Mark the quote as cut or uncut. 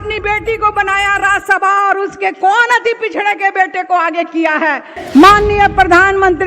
cut